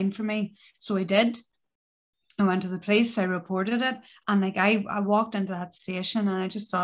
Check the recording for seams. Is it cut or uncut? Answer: uncut